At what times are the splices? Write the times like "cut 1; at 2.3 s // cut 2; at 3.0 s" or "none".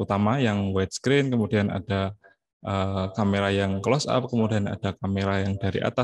none